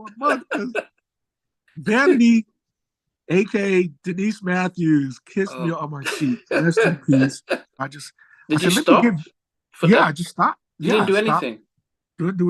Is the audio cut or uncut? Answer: cut